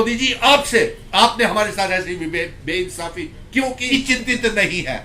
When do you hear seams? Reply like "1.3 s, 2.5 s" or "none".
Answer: 3.9 s